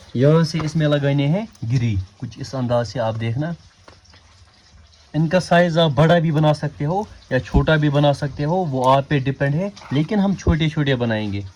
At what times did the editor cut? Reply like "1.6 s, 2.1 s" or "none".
none